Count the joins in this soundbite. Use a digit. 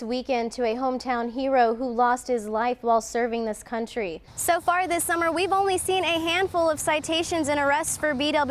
1